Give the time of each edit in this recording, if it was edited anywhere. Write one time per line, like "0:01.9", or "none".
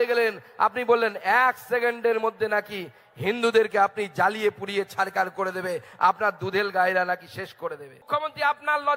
0:08.1